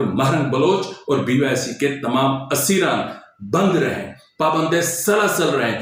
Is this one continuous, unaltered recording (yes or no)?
yes